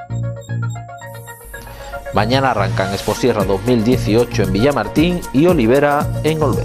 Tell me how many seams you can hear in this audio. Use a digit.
1